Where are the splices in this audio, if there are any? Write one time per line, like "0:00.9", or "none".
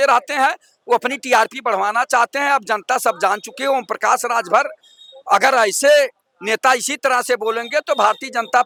none